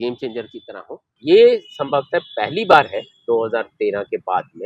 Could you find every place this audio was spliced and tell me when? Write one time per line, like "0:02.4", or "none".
0:01.1